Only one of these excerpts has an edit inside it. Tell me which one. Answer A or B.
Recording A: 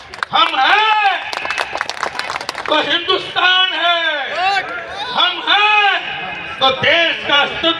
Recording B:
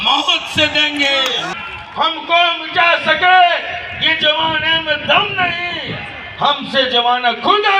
B